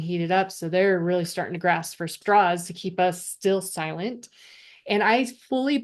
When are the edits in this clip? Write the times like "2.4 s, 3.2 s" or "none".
2.1 s

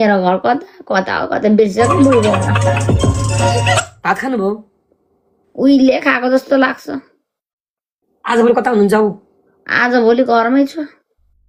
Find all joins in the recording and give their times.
none

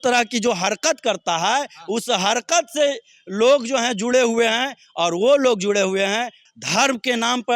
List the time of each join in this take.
none

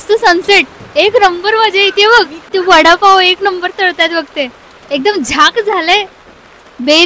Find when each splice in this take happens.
2.4 s

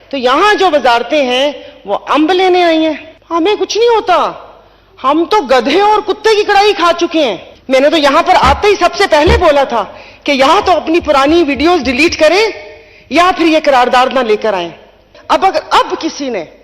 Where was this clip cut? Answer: 3.1 s, 7.5 s, 15.1 s

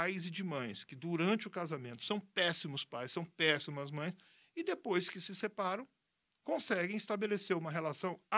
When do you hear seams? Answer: none

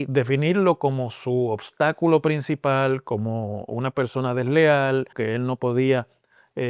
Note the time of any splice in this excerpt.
5.1 s

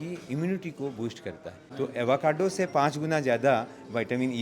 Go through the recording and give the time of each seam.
1.6 s

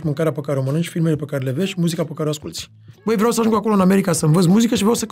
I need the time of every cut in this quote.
2.9 s

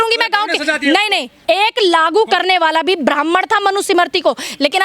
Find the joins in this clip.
1.4 s

